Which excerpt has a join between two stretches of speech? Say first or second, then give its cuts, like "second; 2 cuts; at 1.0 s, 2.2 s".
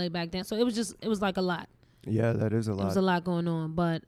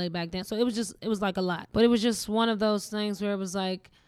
second; 1 cut; at 1.7 s